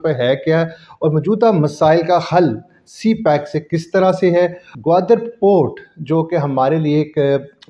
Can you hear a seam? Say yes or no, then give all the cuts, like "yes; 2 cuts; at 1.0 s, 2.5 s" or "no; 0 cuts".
yes; 1 cut; at 4.7 s